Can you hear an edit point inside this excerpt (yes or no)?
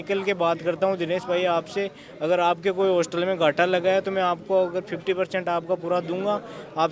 no